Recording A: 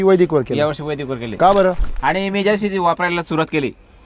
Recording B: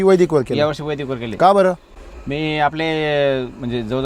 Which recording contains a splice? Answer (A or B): A